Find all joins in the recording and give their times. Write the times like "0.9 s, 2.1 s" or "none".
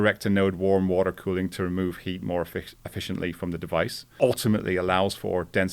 4.0 s